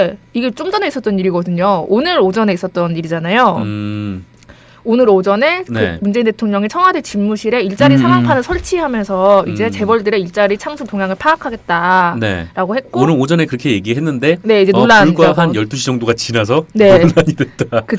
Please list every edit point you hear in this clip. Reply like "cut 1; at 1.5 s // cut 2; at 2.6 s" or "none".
cut 1; at 16.3 s